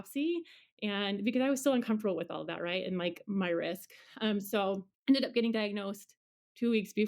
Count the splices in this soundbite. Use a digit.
1